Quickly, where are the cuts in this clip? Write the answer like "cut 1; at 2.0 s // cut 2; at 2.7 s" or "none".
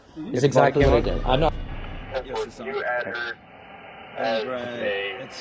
cut 1; at 1.5 s